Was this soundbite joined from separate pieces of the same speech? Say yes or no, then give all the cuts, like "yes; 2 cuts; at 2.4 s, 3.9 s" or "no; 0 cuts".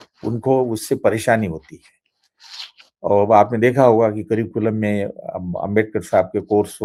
no; 0 cuts